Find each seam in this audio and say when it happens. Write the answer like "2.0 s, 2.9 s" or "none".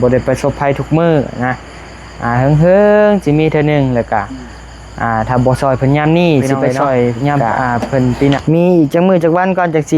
8.4 s